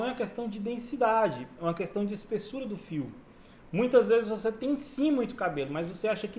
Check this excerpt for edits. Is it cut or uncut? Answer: uncut